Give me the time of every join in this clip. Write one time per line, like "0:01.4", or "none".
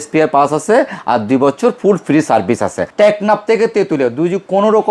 0:02.8

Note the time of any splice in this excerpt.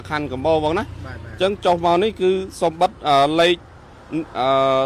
none

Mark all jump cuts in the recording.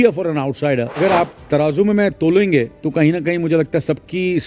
0:01.0
0:02.8

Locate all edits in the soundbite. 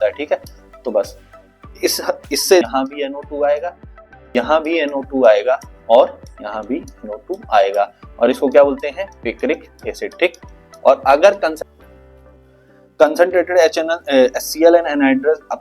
0:02.6
0:11.5

